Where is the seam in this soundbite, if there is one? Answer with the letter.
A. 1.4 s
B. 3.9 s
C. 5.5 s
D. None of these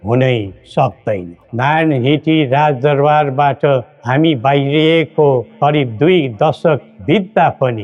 A